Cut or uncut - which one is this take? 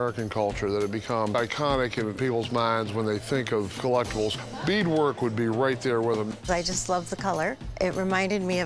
cut